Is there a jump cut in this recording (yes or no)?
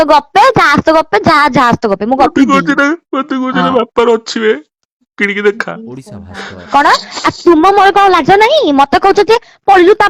no